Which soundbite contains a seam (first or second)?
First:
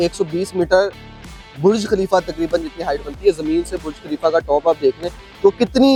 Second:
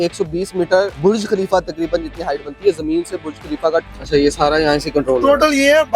second